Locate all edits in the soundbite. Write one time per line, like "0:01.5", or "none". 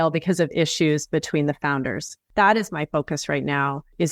0:02.2